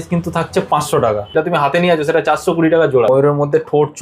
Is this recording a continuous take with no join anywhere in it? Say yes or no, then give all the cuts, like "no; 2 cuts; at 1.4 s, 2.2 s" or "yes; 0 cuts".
no; 2 cuts; at 1.3 s, 3.1 s